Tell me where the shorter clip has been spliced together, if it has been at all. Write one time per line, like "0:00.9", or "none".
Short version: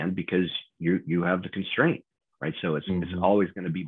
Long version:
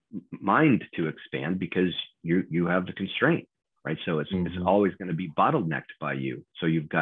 none